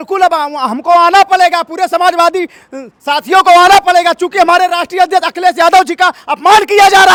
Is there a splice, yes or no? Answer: no